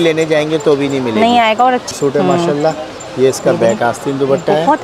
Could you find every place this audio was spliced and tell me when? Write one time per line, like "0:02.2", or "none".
0:01.9